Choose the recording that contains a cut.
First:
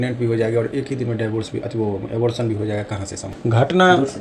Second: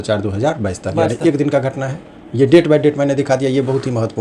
first; 1 cut; at 3.2 s

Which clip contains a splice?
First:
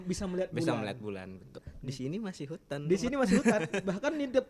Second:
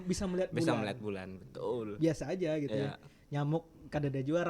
first; 1 cut; at 1.5 s

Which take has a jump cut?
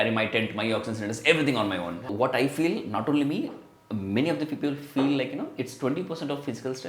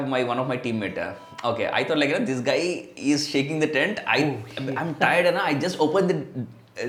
first; 1 cut; at 2.0 s

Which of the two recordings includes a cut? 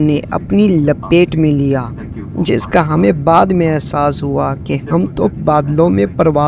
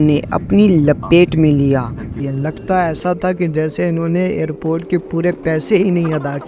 second; 1 cut; at 2.2 s

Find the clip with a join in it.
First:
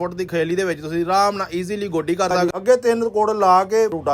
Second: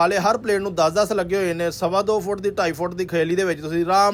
first; 1 cut; at 2.4 s

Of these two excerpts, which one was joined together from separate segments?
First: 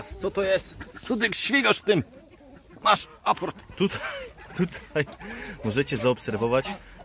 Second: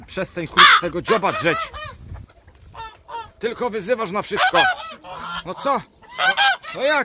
first; 1 cut; at 3.6 s

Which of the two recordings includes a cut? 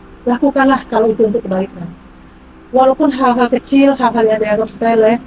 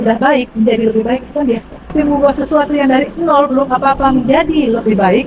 second; 1 cut; at 1.8 s

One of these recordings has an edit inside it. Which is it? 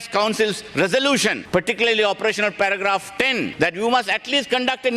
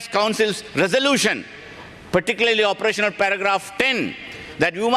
first; 2 cuts; at 1.4 s, 3.5 s

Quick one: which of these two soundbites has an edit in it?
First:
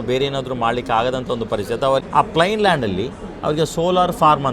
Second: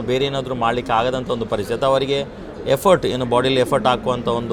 first; 1 cut; at 2.0 s

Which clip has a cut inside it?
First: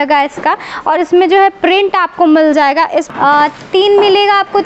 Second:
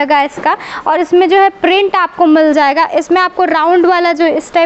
first; 1 cut; at 3.0 s

